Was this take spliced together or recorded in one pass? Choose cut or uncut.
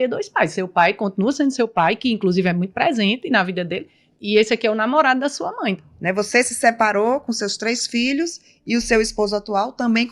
cut